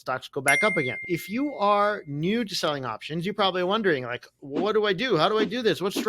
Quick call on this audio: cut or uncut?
cut